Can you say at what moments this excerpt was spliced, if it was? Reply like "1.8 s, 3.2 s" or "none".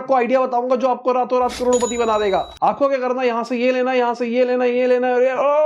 none